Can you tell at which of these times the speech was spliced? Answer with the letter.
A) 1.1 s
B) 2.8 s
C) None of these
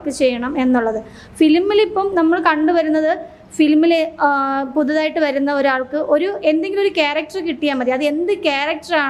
C